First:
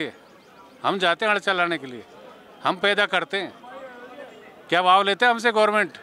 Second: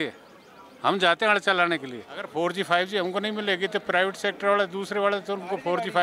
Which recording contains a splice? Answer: second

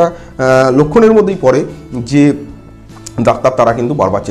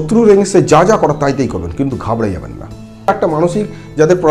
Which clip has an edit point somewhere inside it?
second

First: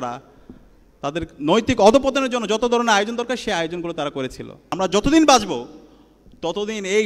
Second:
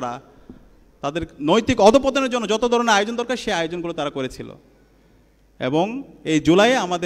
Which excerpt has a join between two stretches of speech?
first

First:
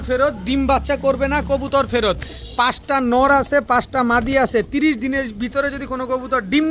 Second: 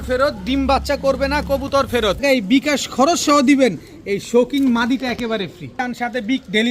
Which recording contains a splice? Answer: second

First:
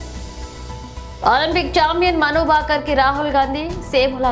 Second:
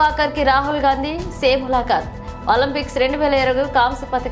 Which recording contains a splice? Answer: first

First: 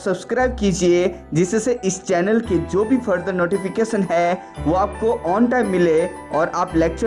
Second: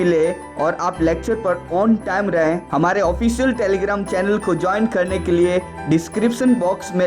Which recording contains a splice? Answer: second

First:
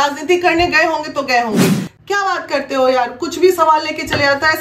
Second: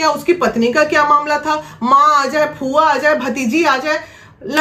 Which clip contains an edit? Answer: first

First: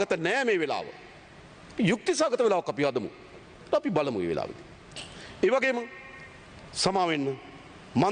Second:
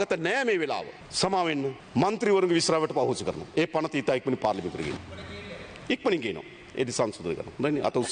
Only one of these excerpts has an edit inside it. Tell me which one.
second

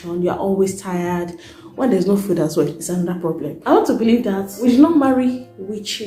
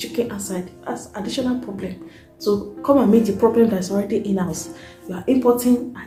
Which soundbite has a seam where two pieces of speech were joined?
first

